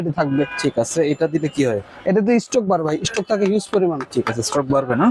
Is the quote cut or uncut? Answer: uncut